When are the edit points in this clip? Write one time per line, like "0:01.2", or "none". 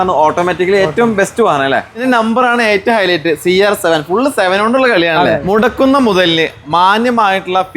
0:02.0
0:05.1

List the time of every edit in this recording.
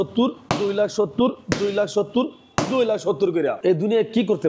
0:03.6

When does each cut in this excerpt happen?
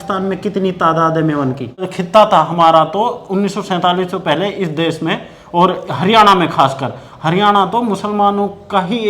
0:01.9

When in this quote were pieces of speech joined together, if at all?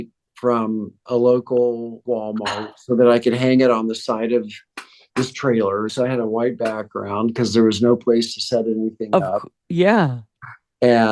0:02.0
0:05.9

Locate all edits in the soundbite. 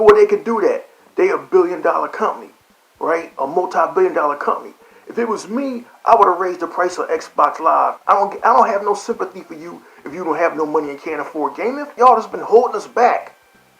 0:08.0
0:11.9

